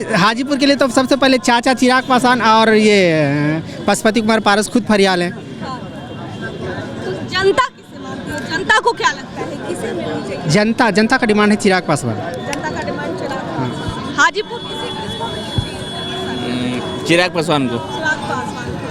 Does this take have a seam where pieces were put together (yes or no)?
no